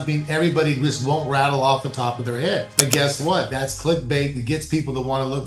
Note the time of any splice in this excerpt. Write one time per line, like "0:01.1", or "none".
none